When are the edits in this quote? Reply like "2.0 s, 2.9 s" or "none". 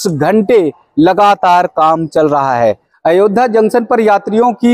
2.9 s

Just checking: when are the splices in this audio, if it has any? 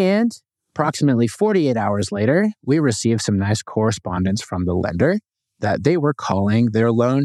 none

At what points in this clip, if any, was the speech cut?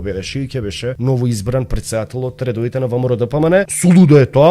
1.0 s, 3.7 s

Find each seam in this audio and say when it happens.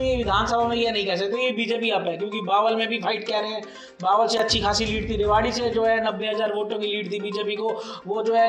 none

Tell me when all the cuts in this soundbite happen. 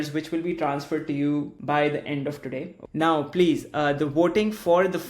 1.6 s, 2.8 s

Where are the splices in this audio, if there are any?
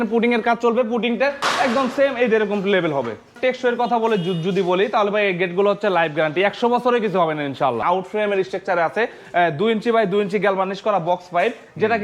3.4 s, 7.8 s

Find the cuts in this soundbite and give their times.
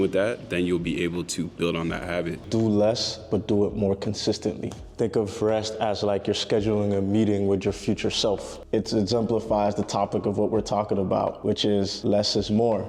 2.4 s, 4.9 s, 8.6 s

